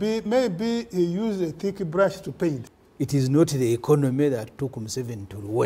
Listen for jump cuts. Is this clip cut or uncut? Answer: cut